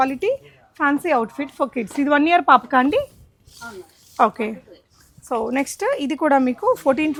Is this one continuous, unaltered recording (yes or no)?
yes